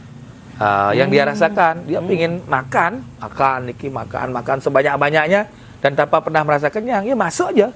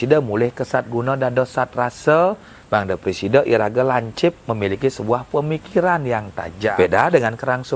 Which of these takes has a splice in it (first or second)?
second